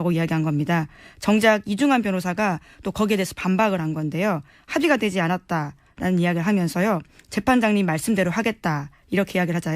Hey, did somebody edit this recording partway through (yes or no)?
yes